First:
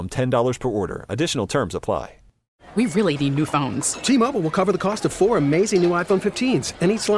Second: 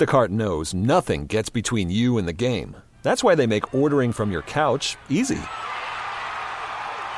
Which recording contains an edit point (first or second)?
first